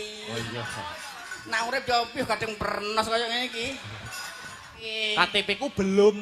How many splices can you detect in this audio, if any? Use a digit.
1